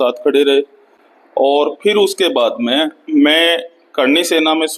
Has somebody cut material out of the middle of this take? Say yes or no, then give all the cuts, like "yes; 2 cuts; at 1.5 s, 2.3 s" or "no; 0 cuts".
no; 0 cuts